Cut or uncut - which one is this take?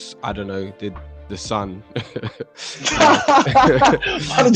uncut